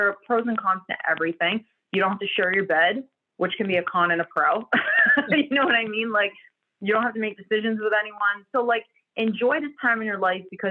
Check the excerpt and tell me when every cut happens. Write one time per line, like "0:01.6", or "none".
none